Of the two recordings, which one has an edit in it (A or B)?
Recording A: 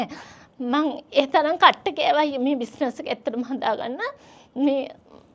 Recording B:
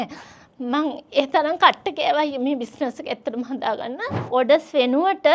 B